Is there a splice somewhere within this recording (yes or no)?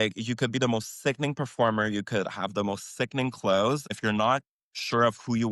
yes